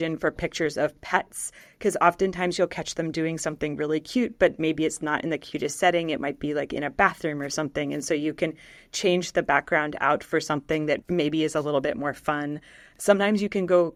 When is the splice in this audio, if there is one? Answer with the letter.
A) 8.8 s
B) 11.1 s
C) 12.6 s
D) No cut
D